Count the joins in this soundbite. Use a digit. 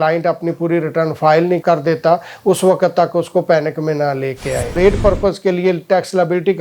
1